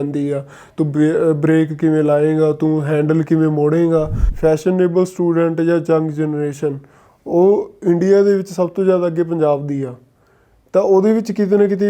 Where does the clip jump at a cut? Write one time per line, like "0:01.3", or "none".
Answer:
0:04.2